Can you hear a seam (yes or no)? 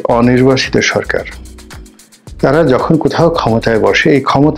no